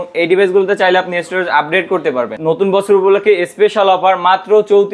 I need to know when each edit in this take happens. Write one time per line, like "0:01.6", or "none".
0:02.3